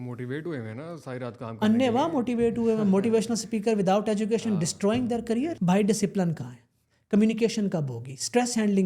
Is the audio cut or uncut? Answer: cut